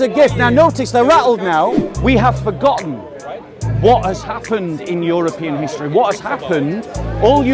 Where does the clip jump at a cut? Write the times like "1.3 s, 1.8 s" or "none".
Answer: 1.9 s